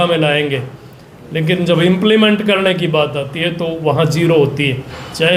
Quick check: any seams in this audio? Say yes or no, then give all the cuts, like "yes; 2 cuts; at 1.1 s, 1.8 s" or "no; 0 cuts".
no; 0 cuts